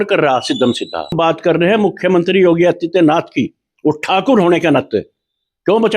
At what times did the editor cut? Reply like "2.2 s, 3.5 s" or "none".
1.2 s

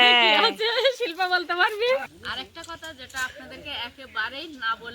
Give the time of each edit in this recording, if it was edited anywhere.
2.1 s

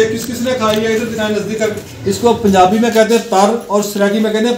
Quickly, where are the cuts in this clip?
1.9 s

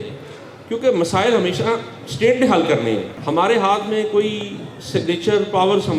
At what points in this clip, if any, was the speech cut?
3.1 s

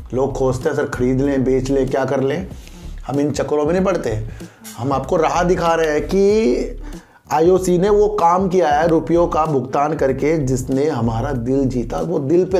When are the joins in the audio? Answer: none

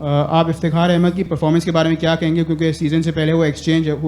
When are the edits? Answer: 1.3 s

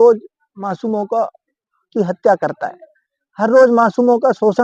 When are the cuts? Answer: none

